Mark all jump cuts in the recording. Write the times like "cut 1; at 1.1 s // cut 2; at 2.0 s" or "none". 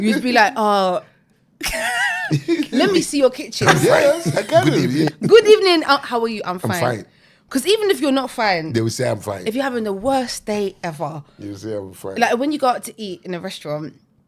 cut 1; at 4.9 s